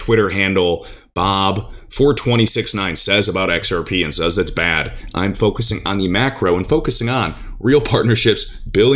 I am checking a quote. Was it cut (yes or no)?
no